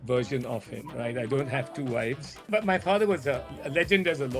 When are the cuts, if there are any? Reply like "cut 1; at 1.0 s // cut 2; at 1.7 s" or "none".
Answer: cut 1; at 2.5 s